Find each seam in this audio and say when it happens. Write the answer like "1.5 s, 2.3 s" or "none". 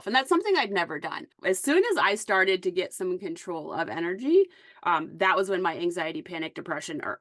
1.3 s